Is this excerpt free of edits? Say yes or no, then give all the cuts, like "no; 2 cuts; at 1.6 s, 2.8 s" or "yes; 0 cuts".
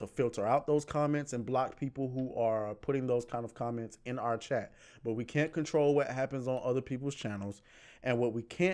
yes; 0 cuts